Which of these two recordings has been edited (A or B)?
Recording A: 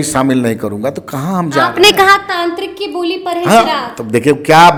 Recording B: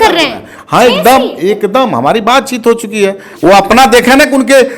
B